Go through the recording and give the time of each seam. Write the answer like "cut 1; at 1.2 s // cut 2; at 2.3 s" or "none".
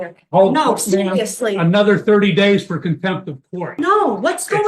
cut 1; at 3.7 s